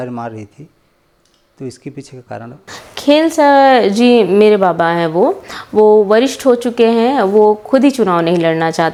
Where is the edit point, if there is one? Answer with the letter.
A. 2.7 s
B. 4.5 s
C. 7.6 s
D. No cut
D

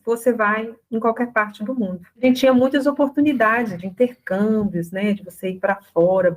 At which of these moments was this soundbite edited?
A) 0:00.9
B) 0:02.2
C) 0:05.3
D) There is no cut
B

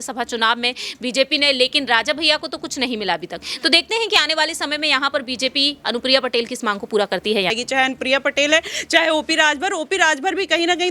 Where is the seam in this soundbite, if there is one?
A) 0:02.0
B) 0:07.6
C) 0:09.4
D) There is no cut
B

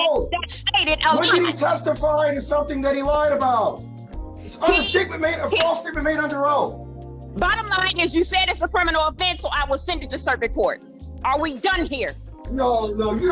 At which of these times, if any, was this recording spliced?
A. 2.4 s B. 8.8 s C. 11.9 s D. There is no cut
D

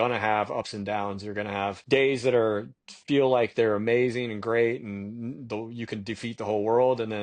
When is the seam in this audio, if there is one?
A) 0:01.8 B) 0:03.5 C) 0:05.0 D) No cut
A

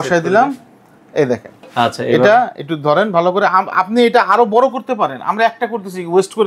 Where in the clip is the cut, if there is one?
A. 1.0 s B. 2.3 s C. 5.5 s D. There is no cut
D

